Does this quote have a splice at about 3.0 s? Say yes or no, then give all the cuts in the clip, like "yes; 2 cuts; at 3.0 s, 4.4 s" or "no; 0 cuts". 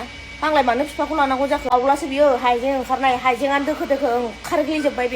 no; 1 cut; at 1.8 s